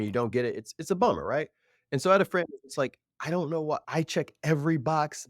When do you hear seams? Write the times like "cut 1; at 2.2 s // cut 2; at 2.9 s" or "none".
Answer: cut 1; at 3.8 s

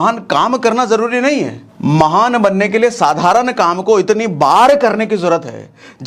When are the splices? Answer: cut 1; at 1.6 s

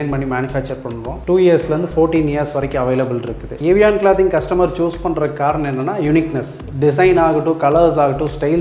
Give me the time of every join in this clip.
cut 1; at 3.4 s

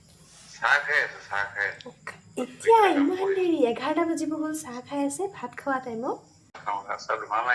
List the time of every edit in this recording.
cut 1; at 6.6 s

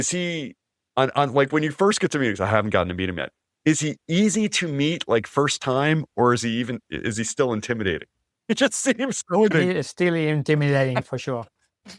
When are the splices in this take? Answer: cut 1; at 9.5 s // cut 2; at 11.0 s

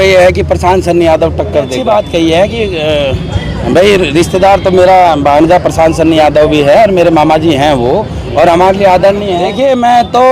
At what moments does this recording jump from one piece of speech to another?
cut 1; at 1.8 s // cut 2; at 9.5 s

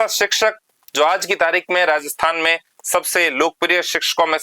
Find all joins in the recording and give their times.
none

